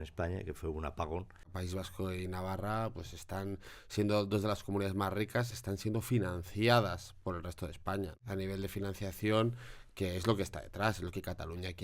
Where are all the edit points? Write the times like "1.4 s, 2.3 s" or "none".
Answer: 1.4 s, 8.2 s